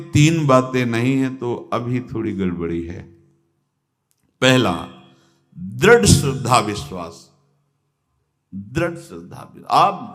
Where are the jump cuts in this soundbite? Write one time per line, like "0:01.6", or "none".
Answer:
none